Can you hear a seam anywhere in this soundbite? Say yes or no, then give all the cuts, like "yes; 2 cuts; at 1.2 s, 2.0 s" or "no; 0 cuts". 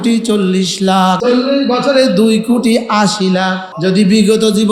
yes; 2 cuts; at 1.2 s, 3.7 s